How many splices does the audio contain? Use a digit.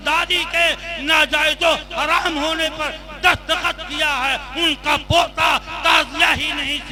0